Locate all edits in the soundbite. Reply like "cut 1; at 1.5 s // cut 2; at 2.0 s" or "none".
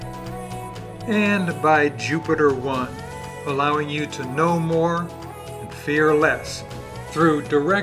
cut 1; at 1.0 s